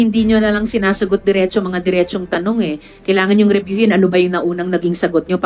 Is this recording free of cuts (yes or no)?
yes